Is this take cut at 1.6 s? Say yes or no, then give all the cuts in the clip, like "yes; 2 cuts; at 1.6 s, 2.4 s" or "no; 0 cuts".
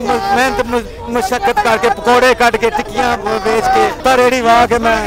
no; 1 cut; at 4.0 s